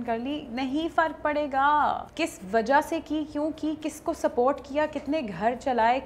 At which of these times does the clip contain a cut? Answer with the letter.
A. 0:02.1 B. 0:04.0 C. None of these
A